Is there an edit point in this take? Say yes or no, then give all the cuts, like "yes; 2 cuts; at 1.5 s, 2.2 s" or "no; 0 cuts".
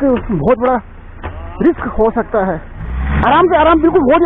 yes; 1 cut; at 2.8 s